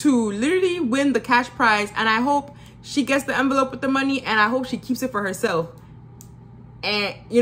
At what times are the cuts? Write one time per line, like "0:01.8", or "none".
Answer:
none